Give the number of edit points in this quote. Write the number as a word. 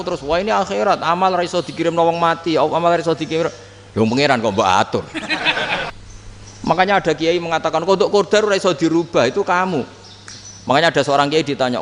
one